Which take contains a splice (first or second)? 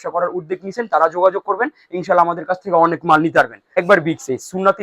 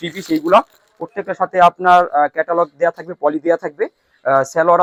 first